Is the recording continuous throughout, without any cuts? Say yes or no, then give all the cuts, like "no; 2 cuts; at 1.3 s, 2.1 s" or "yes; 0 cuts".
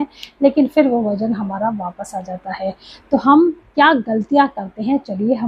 yes; 0 cuts